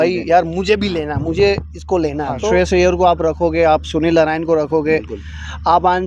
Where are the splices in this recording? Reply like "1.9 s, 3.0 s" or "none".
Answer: 2.4 s